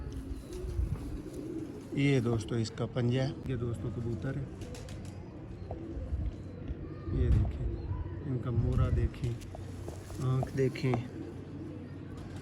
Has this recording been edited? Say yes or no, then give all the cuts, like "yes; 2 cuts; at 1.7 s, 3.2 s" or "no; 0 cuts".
yes; 1 cut; at 3.5 s